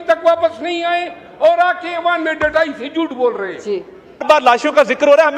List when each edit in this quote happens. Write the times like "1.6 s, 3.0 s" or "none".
4.2 s